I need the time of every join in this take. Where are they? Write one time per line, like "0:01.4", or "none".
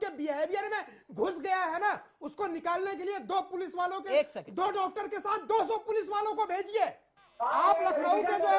0:07.1